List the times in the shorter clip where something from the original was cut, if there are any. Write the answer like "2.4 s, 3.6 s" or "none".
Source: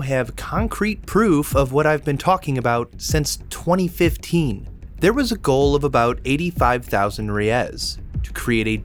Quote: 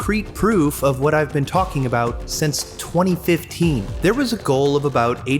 3.9 s